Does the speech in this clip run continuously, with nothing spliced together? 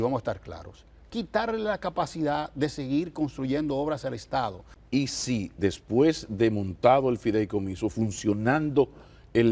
no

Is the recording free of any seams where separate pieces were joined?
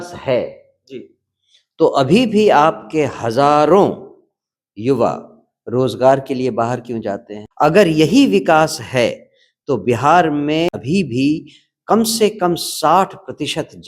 no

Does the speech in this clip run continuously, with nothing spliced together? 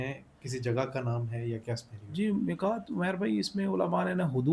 yes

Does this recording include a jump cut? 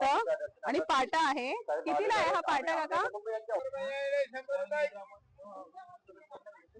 yes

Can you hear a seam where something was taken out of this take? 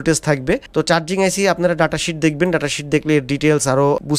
no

